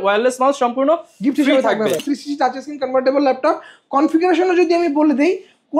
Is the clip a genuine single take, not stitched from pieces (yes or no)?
no